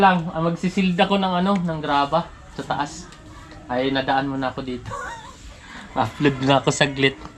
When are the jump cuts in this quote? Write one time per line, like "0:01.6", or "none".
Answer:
none